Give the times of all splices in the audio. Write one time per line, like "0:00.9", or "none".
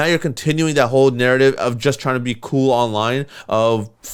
none